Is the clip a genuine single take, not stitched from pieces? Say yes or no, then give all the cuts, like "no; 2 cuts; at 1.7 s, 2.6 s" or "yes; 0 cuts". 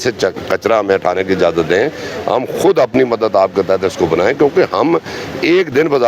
yes; 0 cuts